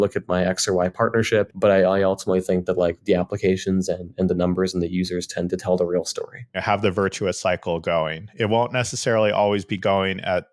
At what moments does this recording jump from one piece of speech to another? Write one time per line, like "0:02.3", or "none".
0:01.5
0:06.6